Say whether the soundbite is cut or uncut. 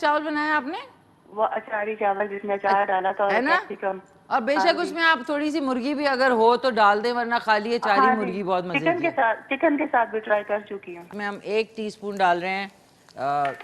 cut